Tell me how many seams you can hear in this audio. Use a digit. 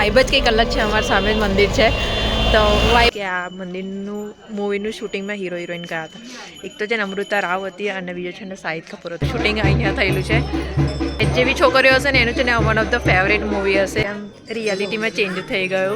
4